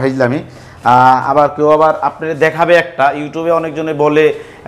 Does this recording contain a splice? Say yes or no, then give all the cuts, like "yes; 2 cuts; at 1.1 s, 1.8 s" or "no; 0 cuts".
no; 0 cuts